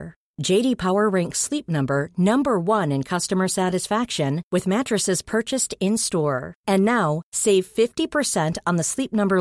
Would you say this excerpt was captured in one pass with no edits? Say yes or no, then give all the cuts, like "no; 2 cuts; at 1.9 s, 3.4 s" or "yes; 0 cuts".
yes; 0 cuts